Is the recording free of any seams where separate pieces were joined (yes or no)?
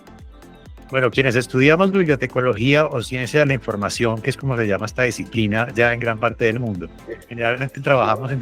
no